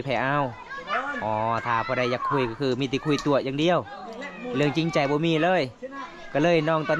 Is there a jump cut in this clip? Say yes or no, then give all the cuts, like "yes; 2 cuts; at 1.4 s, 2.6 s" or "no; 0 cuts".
no; 0 cuts